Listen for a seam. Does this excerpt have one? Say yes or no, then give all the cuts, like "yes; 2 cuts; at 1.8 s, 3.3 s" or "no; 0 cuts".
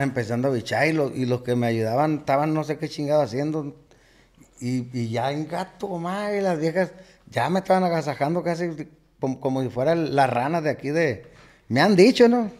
no; 0 cuts